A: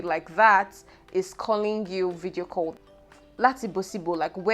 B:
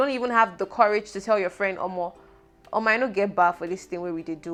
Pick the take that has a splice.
A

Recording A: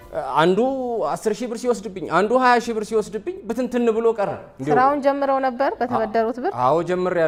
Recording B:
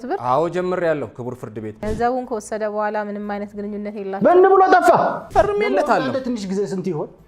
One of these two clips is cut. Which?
B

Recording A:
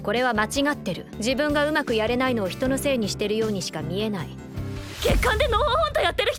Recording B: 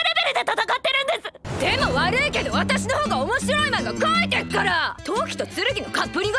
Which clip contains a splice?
B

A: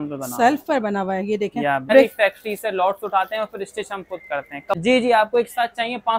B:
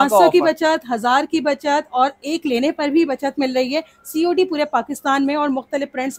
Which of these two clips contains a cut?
A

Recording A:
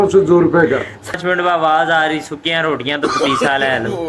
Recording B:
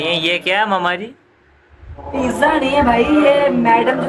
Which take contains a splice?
A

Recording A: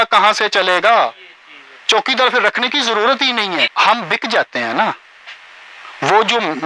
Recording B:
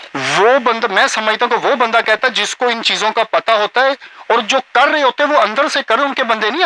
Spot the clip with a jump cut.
A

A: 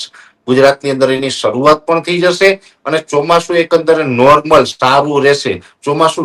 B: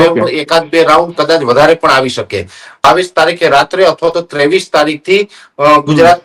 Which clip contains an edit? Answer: B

